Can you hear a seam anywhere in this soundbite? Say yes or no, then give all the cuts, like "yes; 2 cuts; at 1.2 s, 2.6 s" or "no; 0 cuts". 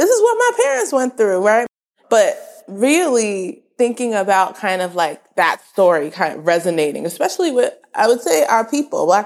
yes; 1 cut; at 1.7 s